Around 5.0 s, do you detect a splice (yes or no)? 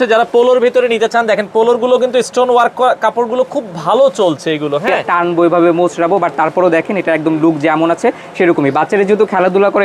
yes